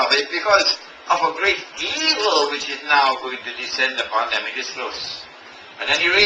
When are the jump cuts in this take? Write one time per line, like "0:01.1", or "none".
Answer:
0:01.4